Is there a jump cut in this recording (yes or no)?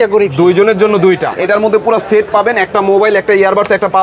yes